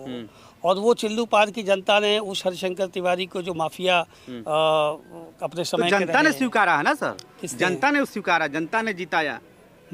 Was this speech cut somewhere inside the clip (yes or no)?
no